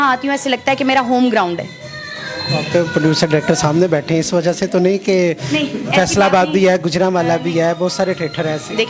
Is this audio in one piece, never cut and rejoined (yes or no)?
yes